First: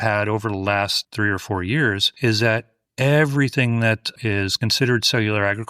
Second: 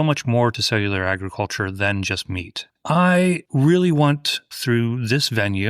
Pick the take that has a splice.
second; 1 cut; at 2.8 s

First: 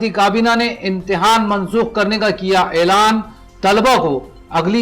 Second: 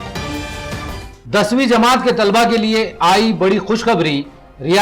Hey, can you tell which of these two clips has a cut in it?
second; 1 cut; at 1.0 s

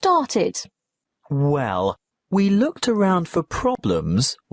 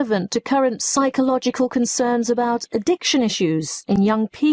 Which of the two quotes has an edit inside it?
first; 1 cut; at 1.5 s

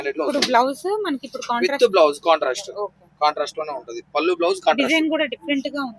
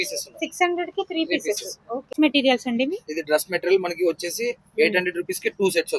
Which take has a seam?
second; 1 cut; at 2.0 s

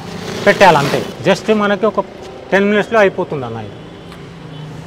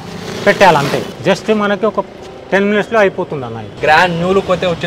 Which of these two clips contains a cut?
second; 1 cut; at 3.7 s

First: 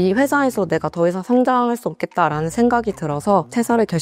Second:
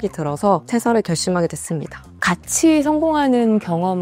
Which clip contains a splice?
second; 1 cut; at 2.1 s

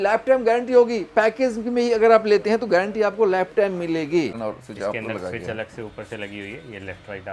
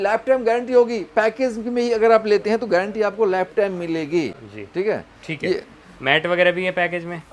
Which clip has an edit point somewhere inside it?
first; 1 cut; at 4.4 s

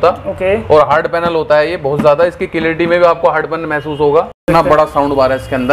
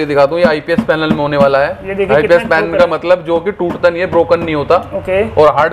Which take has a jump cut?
first; 1 cut; at 4.4 s

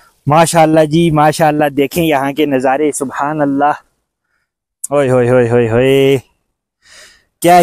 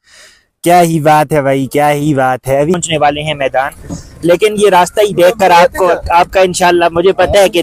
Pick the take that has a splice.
second; 1 cut; at 2.7 s

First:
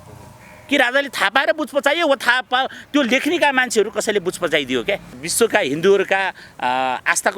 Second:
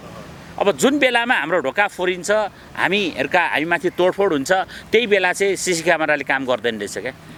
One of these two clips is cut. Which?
first; 1 cut; at 5.2 s

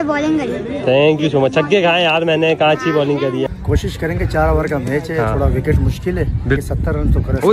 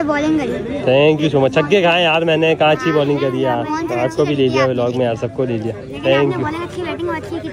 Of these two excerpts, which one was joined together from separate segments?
first; 2 cuts; at 3.5 s, 6.6 s

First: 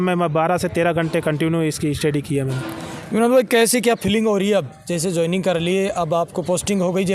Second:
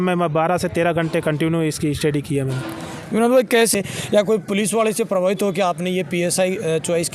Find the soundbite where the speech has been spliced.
second; 1 cut; at 3.7 s

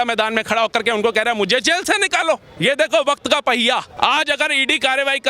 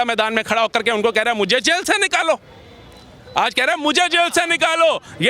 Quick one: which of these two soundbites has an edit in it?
first; 2 cuts; at 2.5 s, 3.9 s

